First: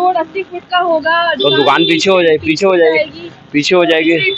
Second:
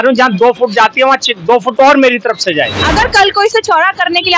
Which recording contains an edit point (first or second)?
second